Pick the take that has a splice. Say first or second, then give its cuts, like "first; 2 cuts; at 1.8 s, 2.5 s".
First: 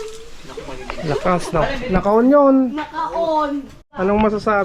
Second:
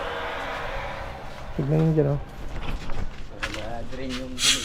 first; 1 cut; at 3.8 s